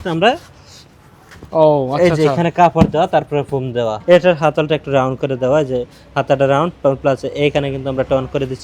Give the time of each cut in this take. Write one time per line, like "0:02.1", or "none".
0:04.0